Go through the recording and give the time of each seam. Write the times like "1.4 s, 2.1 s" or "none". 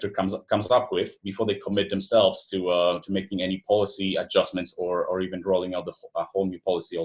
none